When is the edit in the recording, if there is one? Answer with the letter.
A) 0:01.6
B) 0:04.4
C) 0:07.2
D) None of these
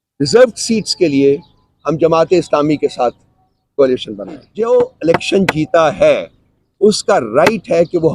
B